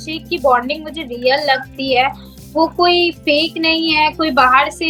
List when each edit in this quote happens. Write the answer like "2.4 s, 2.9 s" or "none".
none